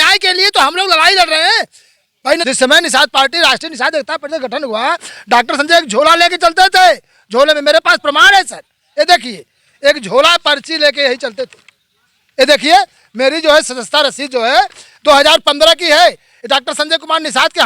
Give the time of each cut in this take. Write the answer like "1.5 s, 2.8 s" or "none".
2.4 s